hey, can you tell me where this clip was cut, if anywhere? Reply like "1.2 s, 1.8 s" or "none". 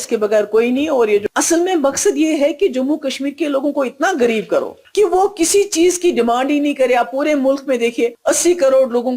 1.2 s, 4.8 s, 8.2 s